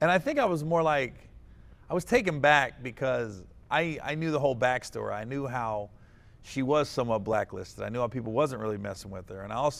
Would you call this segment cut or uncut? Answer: uncut